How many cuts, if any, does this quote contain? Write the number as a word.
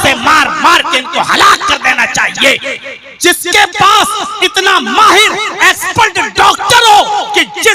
zero